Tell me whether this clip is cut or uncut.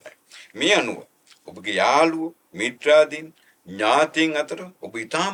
uncut